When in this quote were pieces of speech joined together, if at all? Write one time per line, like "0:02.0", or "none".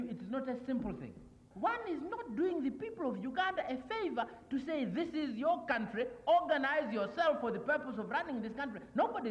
0:01.4